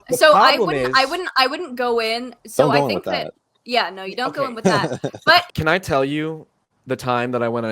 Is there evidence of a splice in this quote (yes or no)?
yes